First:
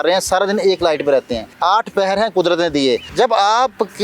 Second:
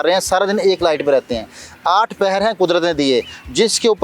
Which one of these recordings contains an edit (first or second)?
first